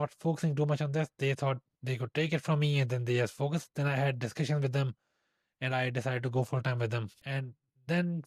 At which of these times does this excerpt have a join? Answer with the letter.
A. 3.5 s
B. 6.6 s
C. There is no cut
C